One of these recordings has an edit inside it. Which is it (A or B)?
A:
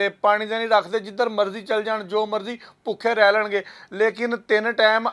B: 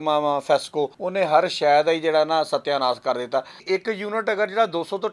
B